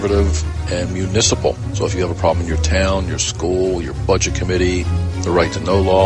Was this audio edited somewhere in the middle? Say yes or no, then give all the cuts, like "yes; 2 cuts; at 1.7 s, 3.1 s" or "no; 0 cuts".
no; 0 cuts